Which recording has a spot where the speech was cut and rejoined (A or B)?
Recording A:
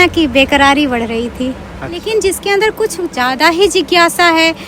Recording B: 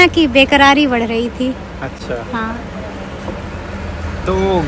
A